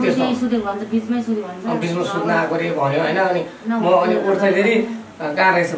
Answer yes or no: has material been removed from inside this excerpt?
no